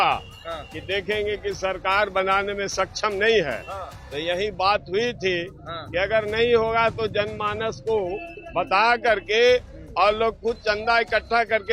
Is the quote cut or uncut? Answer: uncut